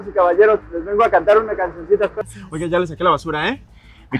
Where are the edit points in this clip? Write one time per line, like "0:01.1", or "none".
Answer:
0:02.1